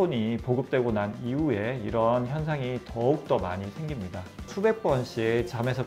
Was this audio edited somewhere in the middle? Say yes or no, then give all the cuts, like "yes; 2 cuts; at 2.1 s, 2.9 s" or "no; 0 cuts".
yes; 1 cut; at 4.5 s